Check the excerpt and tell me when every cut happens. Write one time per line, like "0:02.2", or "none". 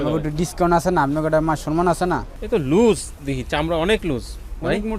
0:02.3